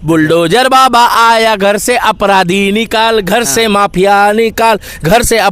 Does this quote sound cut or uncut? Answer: uncut